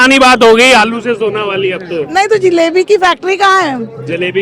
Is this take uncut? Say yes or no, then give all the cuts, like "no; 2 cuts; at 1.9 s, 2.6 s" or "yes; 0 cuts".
yes; 0 cuts